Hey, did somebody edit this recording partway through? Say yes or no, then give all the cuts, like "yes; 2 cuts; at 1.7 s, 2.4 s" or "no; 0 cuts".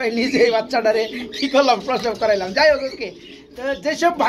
no; 0 cuts